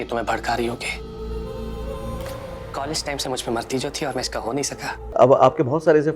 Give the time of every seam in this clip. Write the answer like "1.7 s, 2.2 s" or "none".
5.0 s